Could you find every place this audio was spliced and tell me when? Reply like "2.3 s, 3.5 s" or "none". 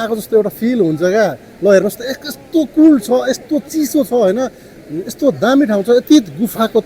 none